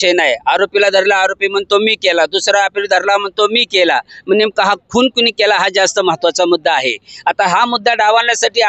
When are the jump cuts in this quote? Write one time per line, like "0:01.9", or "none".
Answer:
none